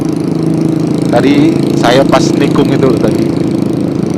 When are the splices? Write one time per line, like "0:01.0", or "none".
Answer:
none